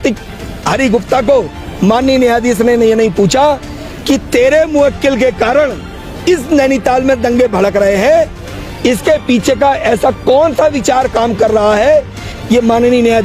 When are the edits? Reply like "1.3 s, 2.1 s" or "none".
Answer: 12.3 s